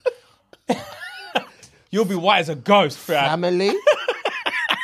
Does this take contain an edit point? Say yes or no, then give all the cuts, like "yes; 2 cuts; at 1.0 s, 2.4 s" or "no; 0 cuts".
no; 0 cuts